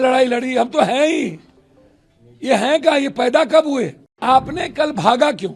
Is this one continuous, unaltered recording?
no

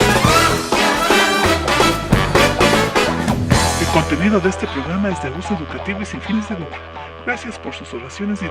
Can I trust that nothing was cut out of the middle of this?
yes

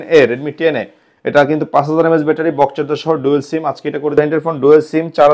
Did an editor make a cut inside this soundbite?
yes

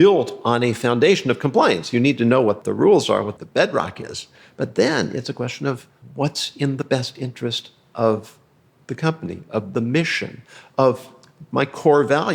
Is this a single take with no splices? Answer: no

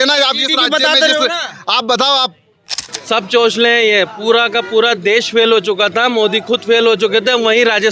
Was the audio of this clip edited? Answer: yes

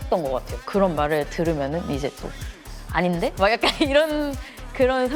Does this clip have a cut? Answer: no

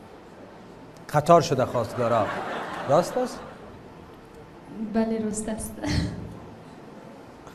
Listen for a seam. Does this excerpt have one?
no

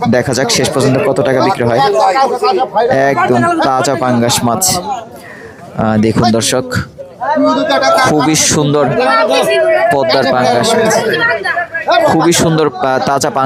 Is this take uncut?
yes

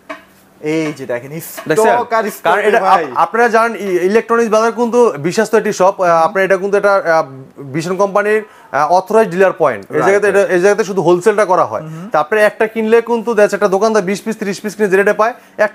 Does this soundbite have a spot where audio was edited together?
no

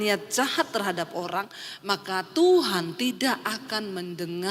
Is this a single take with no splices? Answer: yes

